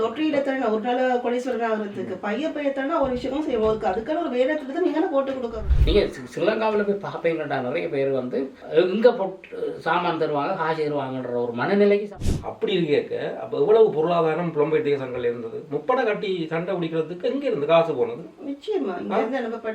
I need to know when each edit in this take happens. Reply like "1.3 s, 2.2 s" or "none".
5.6 s, 12.1 s